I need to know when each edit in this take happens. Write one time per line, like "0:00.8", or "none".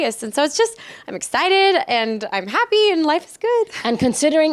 none